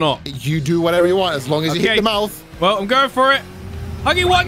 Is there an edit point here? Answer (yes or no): no